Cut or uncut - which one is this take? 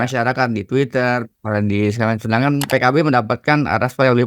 cut